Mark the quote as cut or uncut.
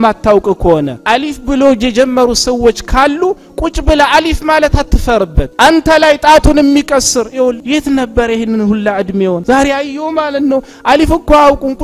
cut